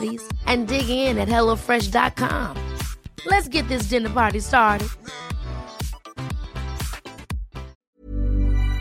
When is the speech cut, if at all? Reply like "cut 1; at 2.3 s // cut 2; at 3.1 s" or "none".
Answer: cut 1; at 7.7 s